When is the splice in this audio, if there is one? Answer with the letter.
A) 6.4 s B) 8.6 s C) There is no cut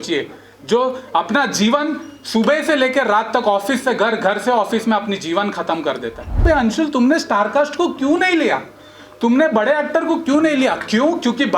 A